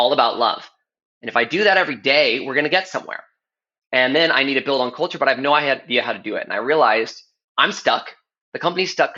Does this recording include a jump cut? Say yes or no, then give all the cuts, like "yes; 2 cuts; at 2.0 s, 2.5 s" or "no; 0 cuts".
no; 0 cuts